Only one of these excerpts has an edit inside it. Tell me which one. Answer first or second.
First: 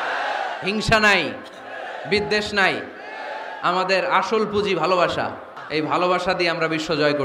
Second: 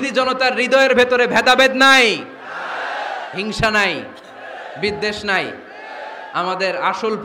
first